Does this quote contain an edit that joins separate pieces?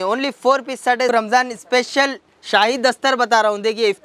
yes; 1 cut; at 1.1 s

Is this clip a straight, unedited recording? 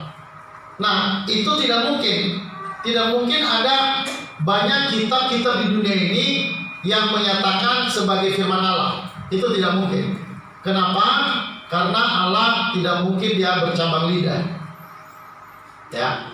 yes; 0 cuts

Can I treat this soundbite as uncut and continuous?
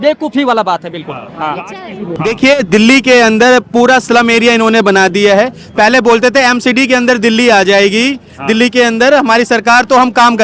yes; 0 cuts

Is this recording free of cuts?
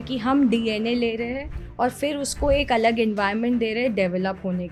yes; 0 cuts

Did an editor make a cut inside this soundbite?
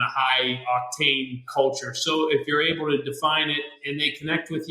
yes; 2 cuts; at 1.5 s, 3.8 s

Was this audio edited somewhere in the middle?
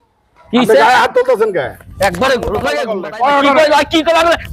yes; 1 cut; at 2.9 s

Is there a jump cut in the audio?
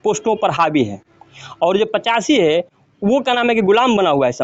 no; 0 cuts

